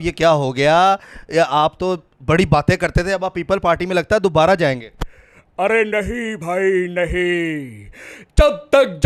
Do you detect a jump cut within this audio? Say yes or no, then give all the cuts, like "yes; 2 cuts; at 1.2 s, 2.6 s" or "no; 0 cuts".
no; 0 cuts